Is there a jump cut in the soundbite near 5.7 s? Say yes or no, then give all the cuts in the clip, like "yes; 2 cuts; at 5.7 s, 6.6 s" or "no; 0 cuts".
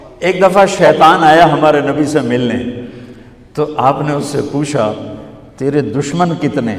no; 0 cuts